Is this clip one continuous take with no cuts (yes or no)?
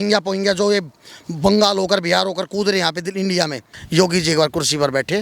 no